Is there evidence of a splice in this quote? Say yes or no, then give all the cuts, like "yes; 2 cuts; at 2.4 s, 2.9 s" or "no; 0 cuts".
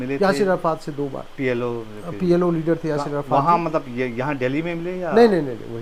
no; 0 cuts